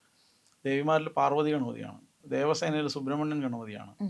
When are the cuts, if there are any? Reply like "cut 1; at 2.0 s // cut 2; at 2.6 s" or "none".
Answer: cut 1; at 2.1 s